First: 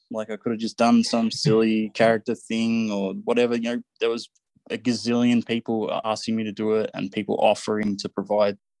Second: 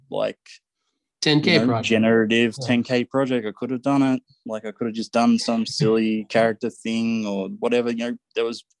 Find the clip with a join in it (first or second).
first